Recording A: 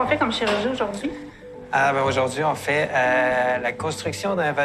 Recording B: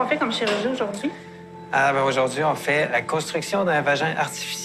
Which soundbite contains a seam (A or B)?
B